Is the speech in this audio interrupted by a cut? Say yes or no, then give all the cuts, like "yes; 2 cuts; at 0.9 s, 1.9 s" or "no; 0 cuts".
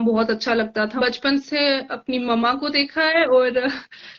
yes; 1 cut; at 0.9 s